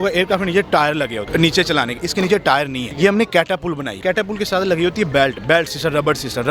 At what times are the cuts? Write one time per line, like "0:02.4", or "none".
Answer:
0:01.2
0:02.8
0:04.0